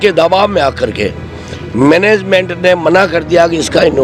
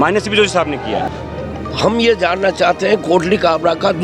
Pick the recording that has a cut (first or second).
second